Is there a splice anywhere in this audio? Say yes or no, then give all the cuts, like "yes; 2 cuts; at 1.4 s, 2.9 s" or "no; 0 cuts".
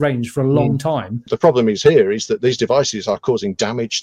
yes; 1 cut; at 1.3 s